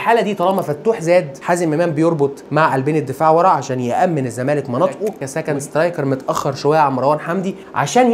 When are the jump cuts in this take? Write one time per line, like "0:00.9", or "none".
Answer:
0:05.2